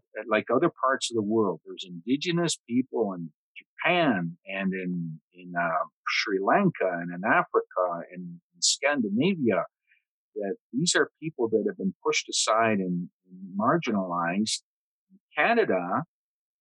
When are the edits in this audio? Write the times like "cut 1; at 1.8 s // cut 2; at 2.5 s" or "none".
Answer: none